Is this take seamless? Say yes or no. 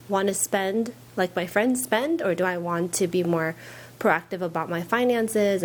yes